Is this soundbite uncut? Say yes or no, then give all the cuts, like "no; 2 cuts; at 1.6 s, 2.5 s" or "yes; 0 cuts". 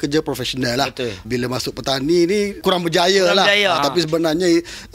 no; 3 cuts; at 1.2 s, 2.6 s, 3.8 s